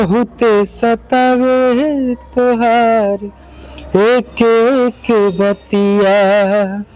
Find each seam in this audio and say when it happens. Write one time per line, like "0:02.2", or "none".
none

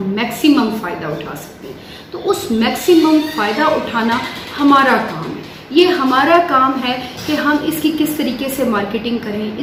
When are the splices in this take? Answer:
none

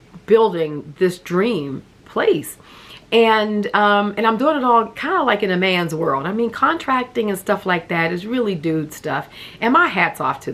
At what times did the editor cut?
none

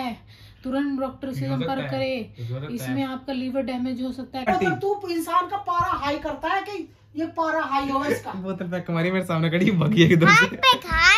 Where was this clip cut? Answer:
0:04.5

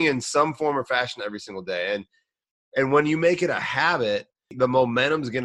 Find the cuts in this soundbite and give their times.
0:04.5

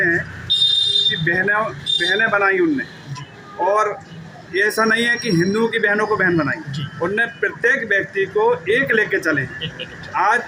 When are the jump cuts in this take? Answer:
none

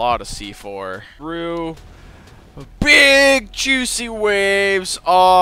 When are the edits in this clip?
0:01.1

